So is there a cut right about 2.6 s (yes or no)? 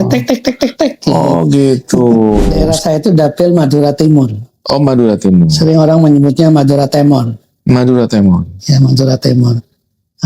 yes